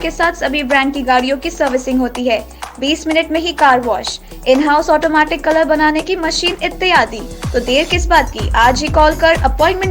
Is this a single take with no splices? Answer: yes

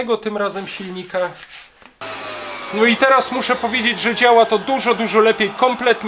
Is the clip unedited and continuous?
no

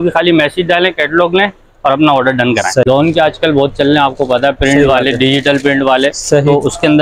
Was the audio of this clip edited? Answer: yes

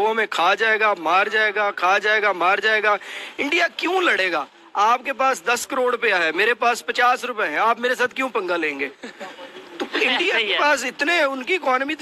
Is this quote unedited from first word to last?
yes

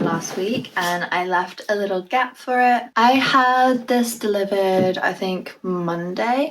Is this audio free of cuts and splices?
yes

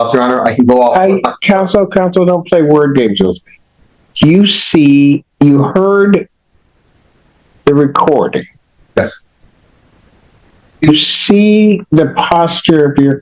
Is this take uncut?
yes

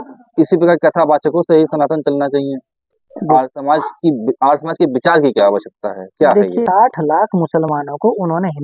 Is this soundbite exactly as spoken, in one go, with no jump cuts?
no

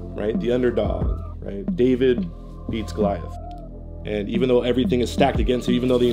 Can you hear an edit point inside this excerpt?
yes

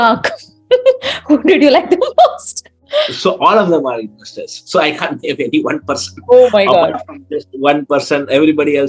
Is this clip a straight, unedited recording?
yes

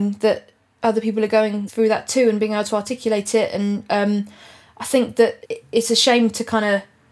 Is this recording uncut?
no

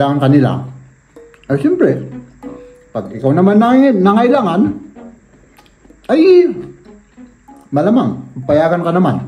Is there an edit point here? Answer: no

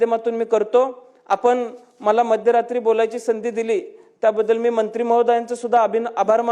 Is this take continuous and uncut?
yes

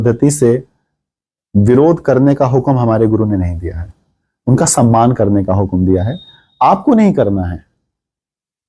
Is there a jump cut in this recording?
no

